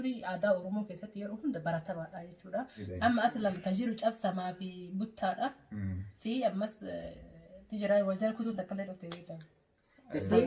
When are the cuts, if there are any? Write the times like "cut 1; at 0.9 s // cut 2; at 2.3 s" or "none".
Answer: cut 1; at 2.8 s